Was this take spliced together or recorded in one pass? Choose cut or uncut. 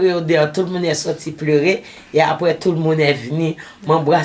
uncut